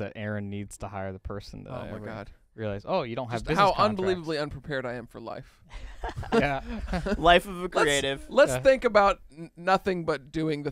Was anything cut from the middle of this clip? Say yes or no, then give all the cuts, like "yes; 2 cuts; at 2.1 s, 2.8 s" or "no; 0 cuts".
no; 0 cuts